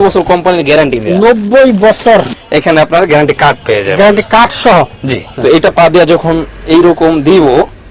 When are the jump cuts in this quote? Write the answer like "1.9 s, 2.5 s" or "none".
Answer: 2.3 s, 5.3 s